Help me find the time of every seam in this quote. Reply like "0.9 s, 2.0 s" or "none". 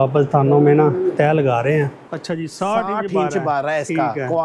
2.1 s

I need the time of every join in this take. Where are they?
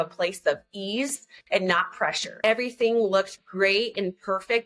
2.3 s

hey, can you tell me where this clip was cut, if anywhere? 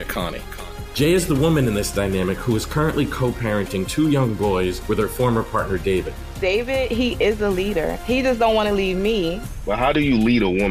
none

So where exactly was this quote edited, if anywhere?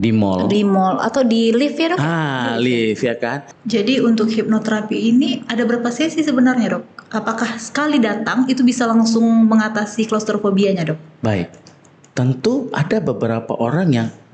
3.5 s

